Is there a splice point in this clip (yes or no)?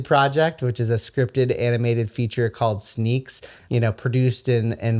yes